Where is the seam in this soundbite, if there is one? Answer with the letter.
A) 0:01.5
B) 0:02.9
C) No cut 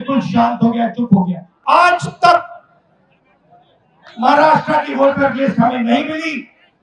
A